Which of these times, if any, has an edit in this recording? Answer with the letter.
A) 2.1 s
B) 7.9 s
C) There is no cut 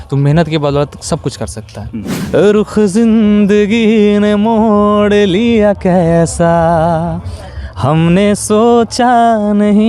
A